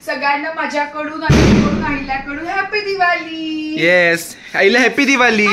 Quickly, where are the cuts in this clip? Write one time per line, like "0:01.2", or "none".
none